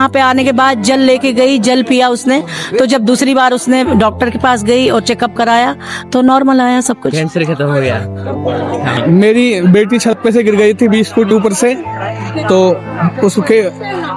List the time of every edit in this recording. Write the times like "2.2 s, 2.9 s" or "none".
9.0 s